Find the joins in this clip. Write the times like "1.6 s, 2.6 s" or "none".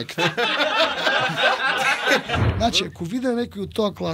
2.4 s